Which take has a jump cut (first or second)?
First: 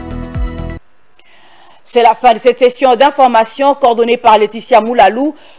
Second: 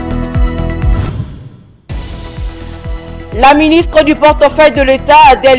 second